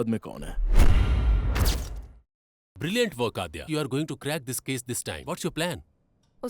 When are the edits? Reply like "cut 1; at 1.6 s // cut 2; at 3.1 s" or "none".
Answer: cut 1; at 2.3 s // cut 2; at 3.7 s